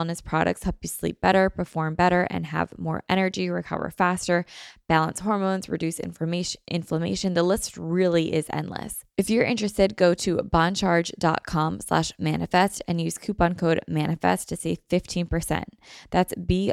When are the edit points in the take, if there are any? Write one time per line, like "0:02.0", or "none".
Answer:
0:09.0